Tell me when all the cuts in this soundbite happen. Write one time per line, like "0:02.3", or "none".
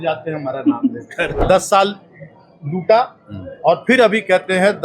0:01.4